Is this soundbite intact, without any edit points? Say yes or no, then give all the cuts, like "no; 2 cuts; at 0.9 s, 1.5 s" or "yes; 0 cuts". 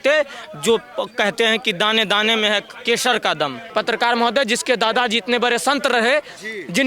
no; 1 cut; at 3.6 s